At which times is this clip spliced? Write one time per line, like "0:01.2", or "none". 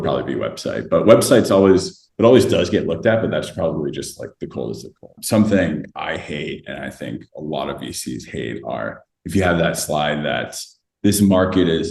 0:05.1